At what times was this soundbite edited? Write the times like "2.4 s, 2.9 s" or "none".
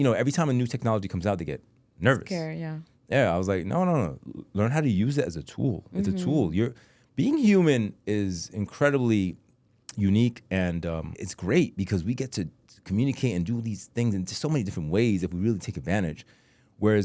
11.1 s

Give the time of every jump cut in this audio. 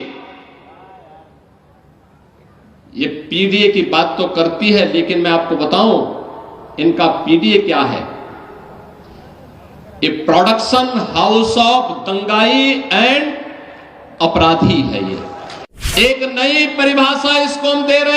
15.8 s

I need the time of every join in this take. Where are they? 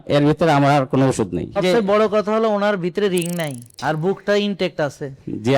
1.6 s, 3.6 s

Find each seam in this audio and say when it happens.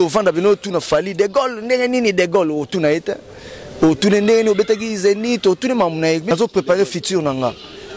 6.2 s

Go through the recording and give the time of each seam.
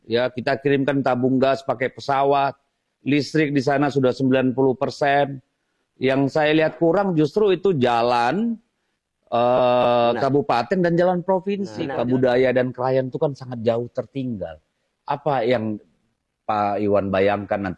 11.8 s

